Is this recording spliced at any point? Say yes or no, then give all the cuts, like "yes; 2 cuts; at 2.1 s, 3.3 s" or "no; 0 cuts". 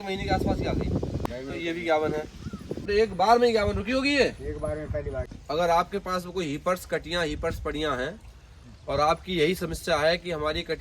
yes; 3 cuts; at 1.2 s, 2.9 s, 5.2 s